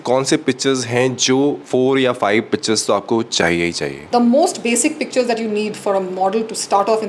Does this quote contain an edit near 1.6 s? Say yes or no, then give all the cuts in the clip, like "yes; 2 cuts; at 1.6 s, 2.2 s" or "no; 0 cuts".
yes; 1 cut; at 1.6 s